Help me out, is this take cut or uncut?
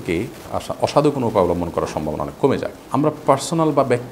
cut